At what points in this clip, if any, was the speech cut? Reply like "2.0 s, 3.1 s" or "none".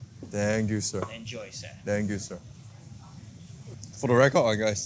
3.7 s